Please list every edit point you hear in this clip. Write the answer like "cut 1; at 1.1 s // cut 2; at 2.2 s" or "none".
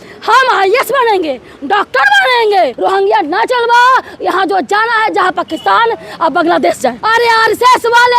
cut 1; at 2.8 s // cut 2; at 7.0 s